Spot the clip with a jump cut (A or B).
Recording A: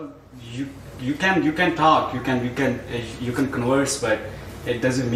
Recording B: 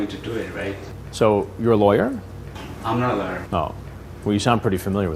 B